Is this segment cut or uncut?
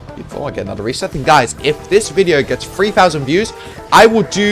cut